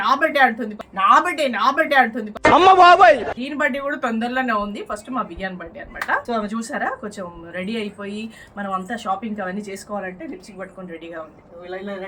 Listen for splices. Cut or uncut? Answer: uncut